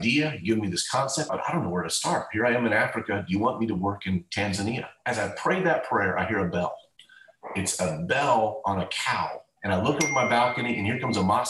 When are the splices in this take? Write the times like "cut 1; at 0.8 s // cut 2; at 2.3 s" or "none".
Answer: cut 1; at 1.3 s // cut 2; at 4.9 s // cut 3; at 9.4 s